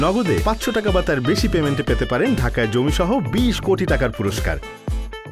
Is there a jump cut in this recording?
no; 0 cuts

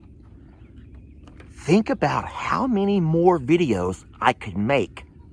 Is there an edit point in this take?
no; 0 cuts

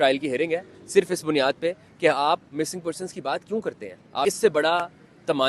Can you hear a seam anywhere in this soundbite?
yes; 1 cut; at 4.3 s

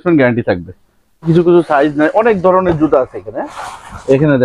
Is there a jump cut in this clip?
yes; 1 cut; at 1.3 s

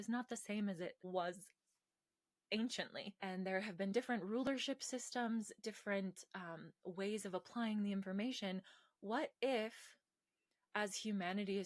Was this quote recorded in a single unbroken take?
no; 2 cuts; at 1.1 s, 3.1 s

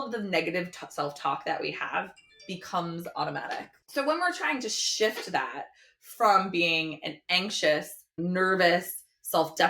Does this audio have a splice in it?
yes; 1 cut; at 8.2 s

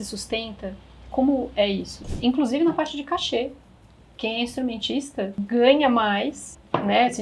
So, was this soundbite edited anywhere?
yes; 2 cuts; at 2.0 s, 5.4 s

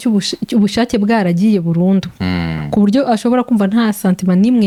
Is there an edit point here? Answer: no; 0 cuts

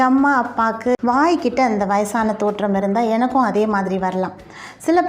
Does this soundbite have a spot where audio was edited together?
yes; 1 cut; at 1.0 s

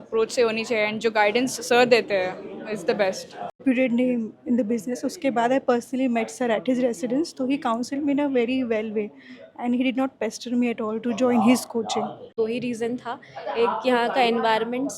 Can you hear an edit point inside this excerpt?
yes; 2 cuts; at 3.6 s, 12.3 s

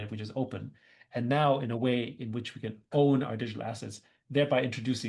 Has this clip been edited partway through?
no; 0 cuts

